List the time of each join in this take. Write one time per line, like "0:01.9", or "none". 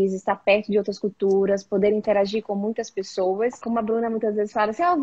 0:03.7